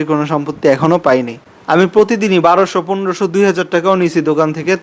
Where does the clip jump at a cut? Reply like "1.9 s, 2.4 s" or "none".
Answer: 1.5 s